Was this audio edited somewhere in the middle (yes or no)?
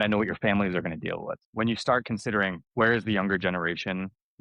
yes